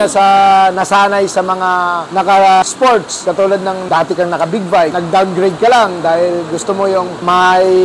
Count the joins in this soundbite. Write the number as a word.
zero